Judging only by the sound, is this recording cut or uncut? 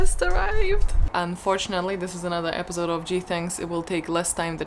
cut